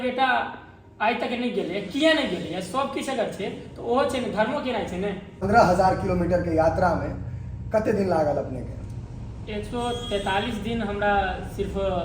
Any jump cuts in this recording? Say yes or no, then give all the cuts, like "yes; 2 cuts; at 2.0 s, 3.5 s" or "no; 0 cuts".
yes; 1 cut; at 5.4 s